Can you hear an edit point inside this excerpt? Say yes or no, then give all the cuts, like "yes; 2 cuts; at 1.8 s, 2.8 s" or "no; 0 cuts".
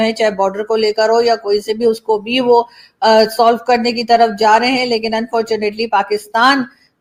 no; 0 cuts